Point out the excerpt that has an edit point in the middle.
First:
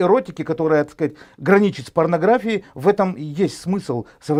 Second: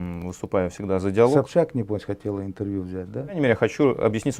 second; 1 cut; at 3.4 s

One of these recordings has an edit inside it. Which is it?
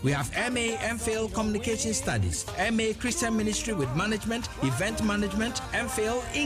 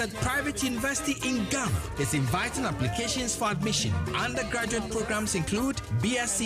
second; 1 cut; at 4.0 s

